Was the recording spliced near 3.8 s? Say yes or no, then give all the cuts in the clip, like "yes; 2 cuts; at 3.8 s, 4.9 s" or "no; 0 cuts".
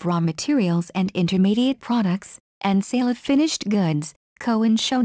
yes; 1 cut; at 3.8 s